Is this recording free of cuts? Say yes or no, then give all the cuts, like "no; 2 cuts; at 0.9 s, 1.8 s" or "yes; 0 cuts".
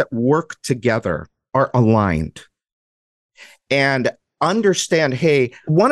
yes; 0 cuts